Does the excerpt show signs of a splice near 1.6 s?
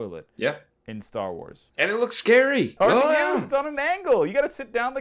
yes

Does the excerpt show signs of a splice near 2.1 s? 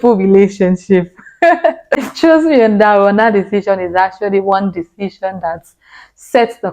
yes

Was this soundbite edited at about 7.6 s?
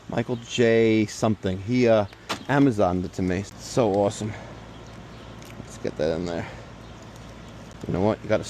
yes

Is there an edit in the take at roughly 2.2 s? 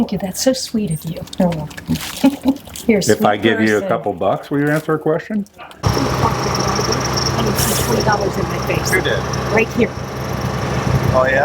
no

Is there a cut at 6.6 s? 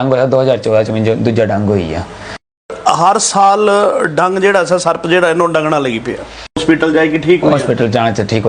yes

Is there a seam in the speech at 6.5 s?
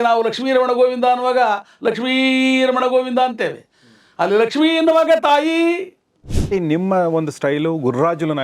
yes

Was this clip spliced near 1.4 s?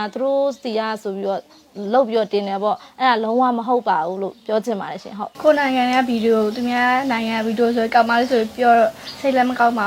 no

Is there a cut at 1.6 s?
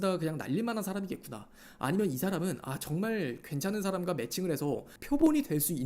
no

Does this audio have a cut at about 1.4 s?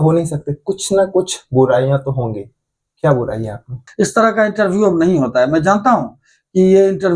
no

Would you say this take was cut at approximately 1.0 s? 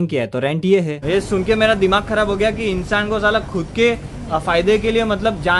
yes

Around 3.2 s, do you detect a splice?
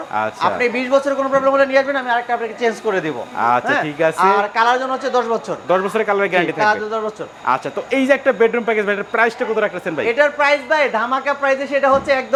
no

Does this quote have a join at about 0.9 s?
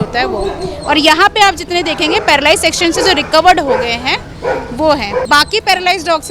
no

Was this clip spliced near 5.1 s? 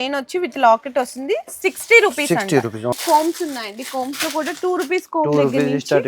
no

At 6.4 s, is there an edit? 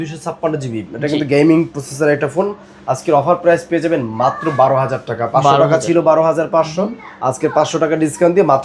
no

